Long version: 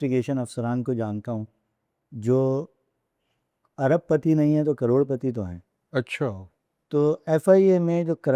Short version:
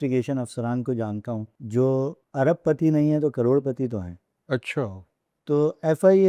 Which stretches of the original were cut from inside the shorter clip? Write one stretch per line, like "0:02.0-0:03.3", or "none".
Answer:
0:01.5-0:02.1
0:02.7-0:03.7